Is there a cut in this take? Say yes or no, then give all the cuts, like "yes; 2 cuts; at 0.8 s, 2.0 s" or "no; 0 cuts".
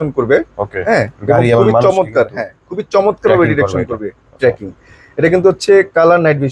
no; 0 cuts